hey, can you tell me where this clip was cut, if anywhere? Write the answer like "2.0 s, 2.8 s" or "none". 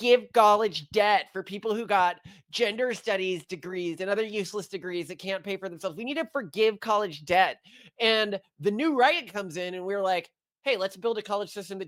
none